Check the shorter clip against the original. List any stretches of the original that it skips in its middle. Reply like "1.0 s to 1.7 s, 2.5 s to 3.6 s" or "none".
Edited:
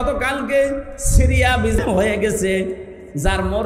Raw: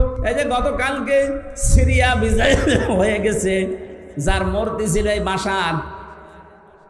2.4 s to 2.8 s